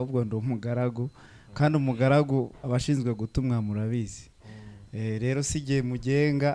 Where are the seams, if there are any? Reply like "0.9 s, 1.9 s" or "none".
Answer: none